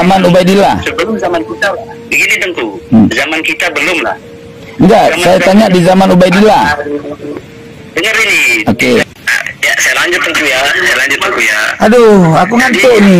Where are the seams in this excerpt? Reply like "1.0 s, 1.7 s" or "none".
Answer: 9.0 s